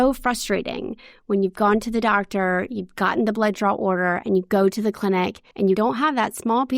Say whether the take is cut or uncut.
cut